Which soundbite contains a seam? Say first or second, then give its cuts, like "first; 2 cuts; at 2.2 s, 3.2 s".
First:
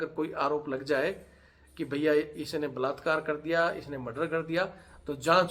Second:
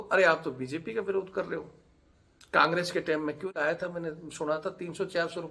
second; 1 cut; at 3.5 s